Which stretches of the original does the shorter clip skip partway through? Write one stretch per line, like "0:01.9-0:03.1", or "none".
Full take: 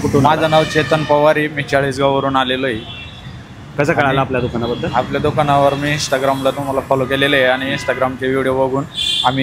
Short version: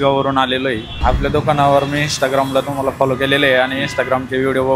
0:02.9-0:04.9